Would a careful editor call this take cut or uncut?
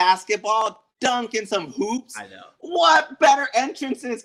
uncut